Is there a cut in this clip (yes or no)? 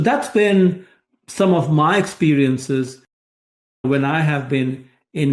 yes